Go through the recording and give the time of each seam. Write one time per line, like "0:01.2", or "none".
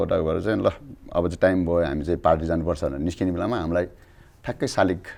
none